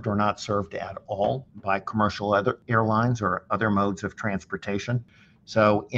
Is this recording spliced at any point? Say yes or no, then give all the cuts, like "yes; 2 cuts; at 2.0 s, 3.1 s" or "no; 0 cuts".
yes; 3 cuts; at 1.5 s, 2.6 s, 5.0 s